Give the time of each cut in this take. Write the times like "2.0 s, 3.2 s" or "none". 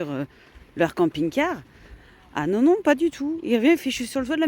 none